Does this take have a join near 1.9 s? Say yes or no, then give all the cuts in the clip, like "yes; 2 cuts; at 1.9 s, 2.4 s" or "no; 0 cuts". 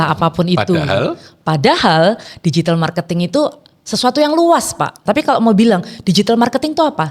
no; 1 cut; at 5.0 s